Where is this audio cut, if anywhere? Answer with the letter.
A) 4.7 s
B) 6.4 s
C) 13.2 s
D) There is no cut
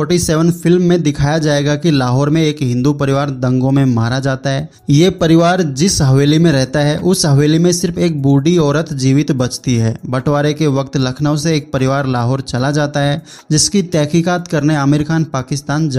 A